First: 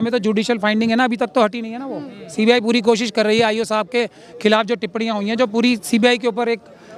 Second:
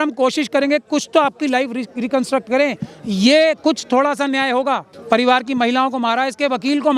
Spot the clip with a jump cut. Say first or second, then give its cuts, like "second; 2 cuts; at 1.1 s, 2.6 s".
second; 1 cut; at 4.9 s